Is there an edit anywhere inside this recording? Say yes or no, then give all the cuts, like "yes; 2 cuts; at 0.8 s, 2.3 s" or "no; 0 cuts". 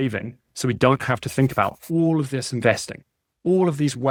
no; 0 cuts